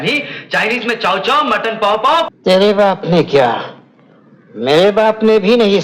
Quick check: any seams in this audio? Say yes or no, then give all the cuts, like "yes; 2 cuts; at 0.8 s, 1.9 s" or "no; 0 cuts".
yes; 1 cut; at 2.3 s